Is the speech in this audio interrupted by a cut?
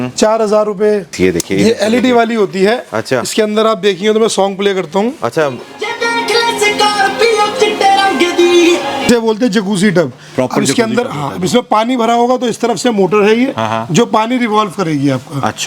yes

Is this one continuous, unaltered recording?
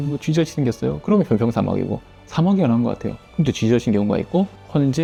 yes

